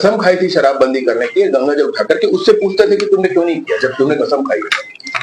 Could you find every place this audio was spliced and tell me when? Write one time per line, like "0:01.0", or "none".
none